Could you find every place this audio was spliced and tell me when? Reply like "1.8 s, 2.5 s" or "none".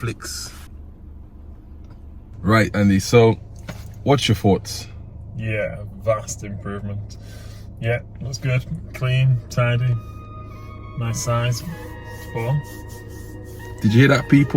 2.3 s

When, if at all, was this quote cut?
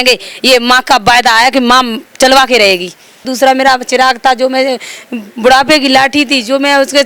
3.3 s

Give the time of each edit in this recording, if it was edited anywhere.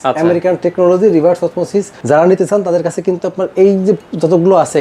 1.9 s

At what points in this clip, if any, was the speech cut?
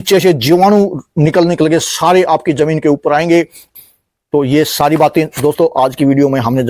3.7 s

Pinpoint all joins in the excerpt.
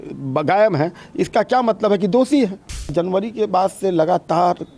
2.9 s

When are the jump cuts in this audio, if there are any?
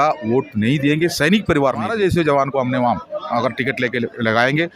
1.9 s

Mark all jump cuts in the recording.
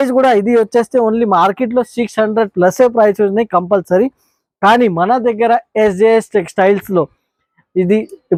none

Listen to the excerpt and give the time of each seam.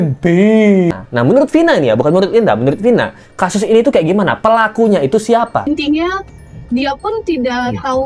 1.0 s, 5.6 s

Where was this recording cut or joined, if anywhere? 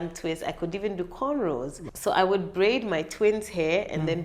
1.9 s

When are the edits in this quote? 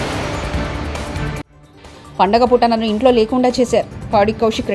1.4 s

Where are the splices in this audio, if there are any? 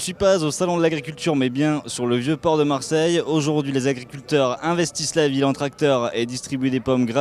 none

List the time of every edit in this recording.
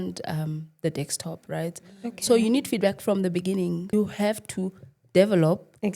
3.9 s

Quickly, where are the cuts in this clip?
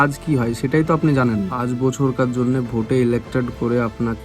1.6 s

